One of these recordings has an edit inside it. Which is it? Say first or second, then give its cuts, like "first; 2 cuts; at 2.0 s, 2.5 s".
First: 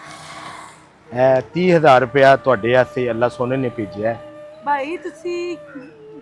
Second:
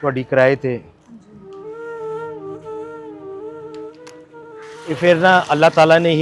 second; 1 cut; at 4.8 s